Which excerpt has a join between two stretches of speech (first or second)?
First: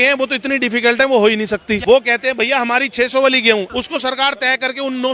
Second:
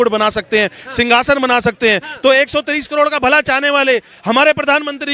first